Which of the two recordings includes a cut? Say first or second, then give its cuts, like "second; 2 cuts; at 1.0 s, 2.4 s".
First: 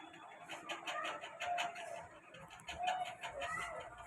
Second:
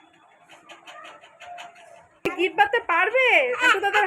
second; 1 cut; at 2.3 s